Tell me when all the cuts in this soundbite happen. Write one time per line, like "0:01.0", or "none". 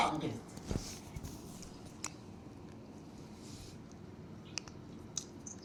none